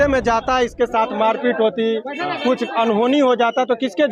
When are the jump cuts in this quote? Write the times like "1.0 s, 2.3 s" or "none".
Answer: none